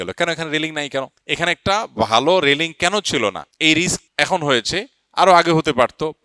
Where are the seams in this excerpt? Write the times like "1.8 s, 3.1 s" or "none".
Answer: 1.2 s, 3.5 s, 4.0 s